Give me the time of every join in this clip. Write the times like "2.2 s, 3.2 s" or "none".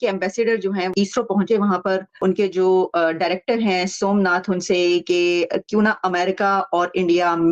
0.9 s, 2.1 s